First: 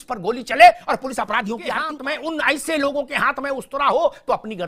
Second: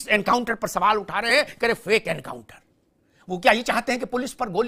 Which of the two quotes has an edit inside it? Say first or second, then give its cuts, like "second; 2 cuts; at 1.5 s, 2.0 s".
first; 1 cut; at 2.0 s